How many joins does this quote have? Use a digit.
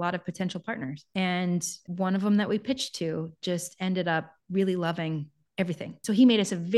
3